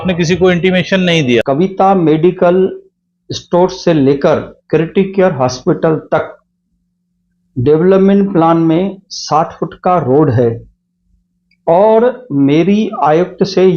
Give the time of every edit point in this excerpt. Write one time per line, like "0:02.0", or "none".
0:01.4